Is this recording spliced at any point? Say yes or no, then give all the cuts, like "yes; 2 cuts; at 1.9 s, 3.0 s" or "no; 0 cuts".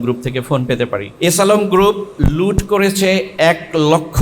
yes; 3 cuts; at 1.1 s, 2.1 s, 3.3 s